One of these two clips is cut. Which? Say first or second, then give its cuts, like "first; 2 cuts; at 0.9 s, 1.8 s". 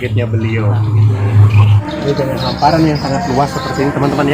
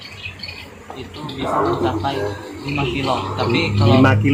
first; 1 cut; at 1.8 s